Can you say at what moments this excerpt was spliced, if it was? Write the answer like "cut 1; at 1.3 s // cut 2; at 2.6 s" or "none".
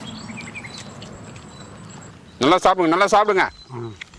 cut 1; at 2.1 s